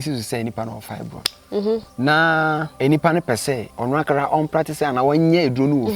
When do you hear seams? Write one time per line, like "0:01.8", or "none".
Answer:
0:01.9
0:02.7
0:03.7